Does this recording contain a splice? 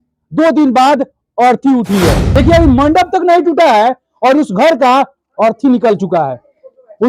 yes; 1 cut; at 2.2 s

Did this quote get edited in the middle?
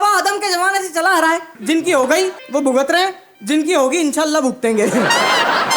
yes; 3 cuts; at 1.5 s, 2.4 s, 3.3 s

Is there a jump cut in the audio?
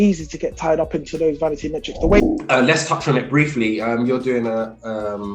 yes; 1 cut; at 2.2 s

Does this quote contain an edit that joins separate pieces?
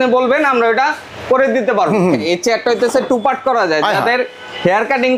yes; 1 cut; at 2.2 s

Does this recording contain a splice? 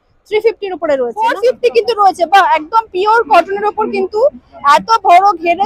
yes; 1 cut; at 1.1 s

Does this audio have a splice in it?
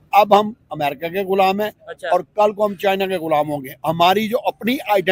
no; 0 cuts

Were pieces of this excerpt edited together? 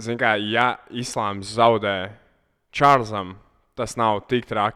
no; 0 cuts

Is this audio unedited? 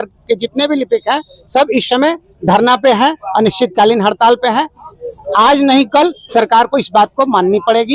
yes; 0 cuts

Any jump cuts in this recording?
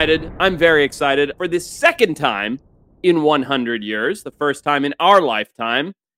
yes; 1 cut; at 1.3 s

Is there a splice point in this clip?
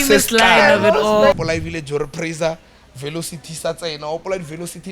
yes; 1 cut; at 1.3 s

